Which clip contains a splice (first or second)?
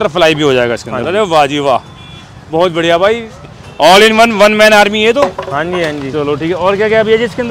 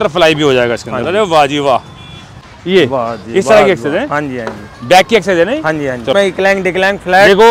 second